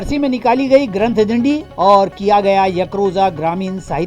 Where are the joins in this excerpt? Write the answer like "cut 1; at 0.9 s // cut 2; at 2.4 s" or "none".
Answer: none